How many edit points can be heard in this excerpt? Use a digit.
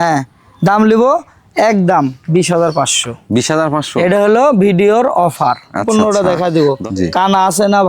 1